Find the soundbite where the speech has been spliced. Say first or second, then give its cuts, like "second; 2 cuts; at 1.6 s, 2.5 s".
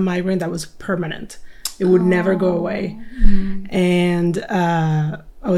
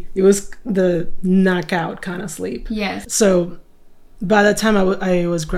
second; 1 cut; at 3.0 s